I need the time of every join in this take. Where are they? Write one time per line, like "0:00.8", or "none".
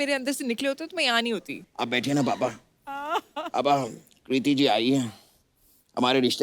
0:01.6

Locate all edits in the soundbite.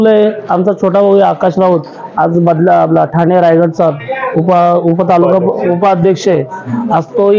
none

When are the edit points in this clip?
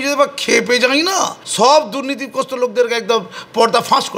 0:01.4

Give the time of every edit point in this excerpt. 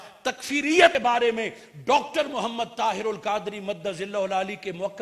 0:01.0

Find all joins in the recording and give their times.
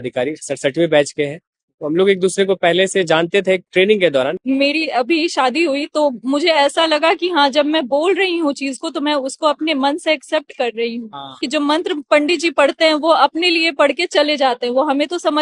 0:04.4
0:11.4

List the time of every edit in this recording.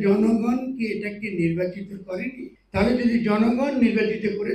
0:02.5

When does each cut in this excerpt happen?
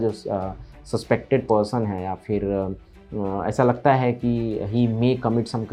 none

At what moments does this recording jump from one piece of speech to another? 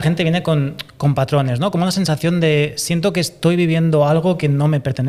none

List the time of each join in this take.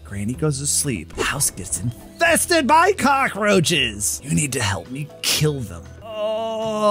0:01.0
0:04.2
0:06.0

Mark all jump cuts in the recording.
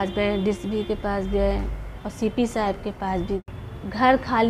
0:03.5

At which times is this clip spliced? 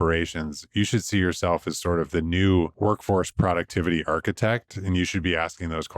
0:02.7

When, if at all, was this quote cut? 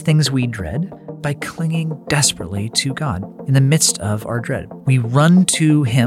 0:01.0
0:03.3
0:04.7

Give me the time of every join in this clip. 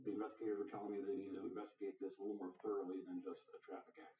0:01.0

